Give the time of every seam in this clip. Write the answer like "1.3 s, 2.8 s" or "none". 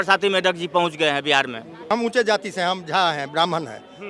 1.9 s